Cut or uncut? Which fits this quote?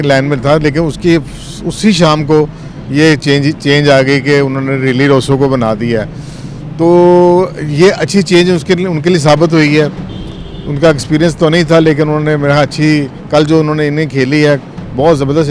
uncut